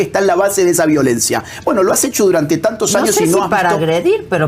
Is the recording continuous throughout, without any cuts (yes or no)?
yes